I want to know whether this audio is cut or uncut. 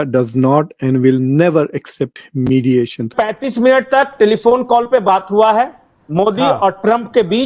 cut